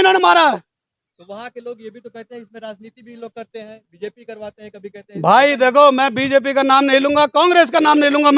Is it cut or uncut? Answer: uncut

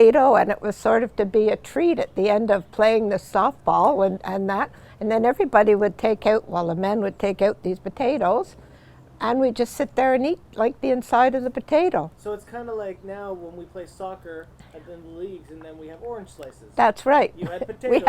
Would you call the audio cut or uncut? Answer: uncut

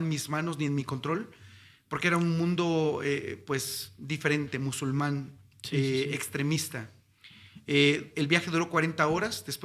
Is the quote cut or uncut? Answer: uncut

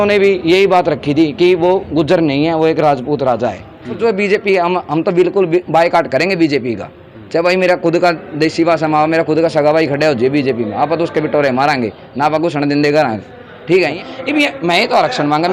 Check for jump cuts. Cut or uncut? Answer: cut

